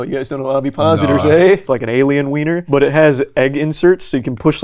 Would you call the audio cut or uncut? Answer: cut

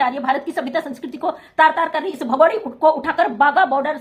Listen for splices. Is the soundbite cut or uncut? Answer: uncut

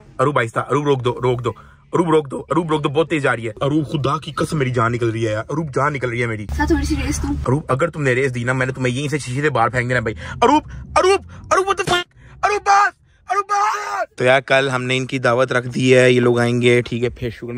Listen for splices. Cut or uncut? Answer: cut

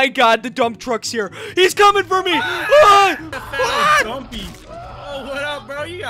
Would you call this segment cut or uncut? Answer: cut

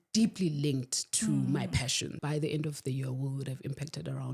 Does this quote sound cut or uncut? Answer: cut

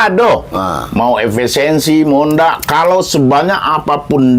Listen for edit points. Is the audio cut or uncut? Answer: uncut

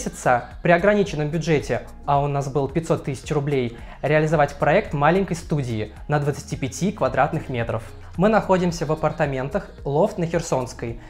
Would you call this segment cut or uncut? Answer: uncut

